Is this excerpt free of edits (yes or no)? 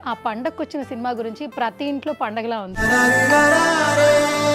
no